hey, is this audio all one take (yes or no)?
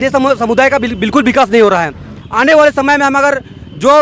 no